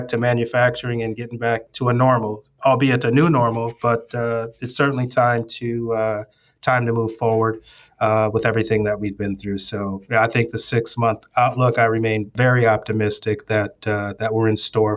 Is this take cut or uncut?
uncut